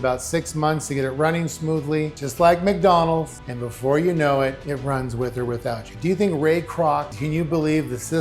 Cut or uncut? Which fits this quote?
cut